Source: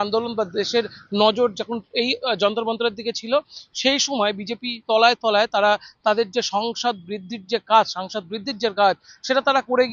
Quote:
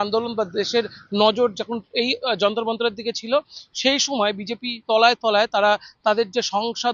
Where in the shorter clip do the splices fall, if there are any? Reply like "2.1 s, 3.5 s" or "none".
none

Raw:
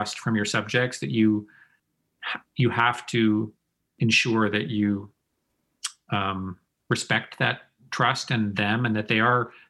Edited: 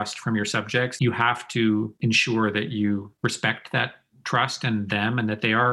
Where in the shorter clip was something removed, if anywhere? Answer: 0.9 s, 1.9 s, 3.1 s

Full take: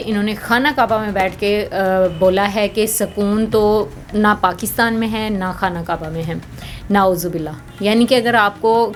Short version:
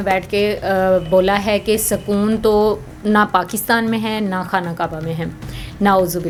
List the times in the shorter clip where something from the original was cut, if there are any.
none

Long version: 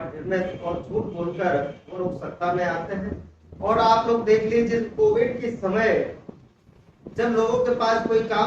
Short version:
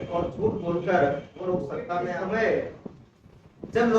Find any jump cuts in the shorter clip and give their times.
2.0 s

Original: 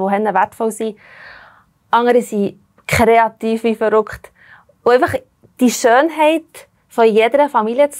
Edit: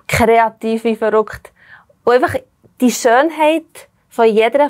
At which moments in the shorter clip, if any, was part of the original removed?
none

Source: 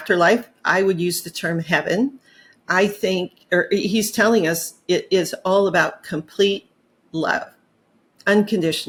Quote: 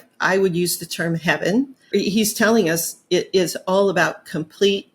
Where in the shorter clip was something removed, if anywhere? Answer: 1.9 s

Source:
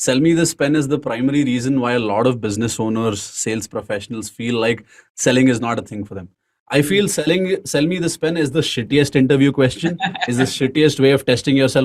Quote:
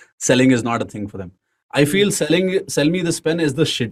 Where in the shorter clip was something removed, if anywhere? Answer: none

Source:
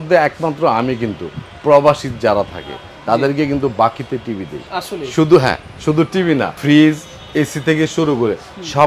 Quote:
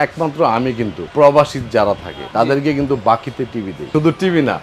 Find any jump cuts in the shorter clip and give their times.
1.0 s, 2.1 s, 3.8 s

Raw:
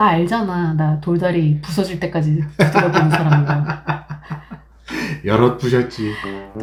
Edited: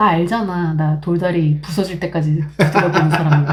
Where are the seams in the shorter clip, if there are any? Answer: none

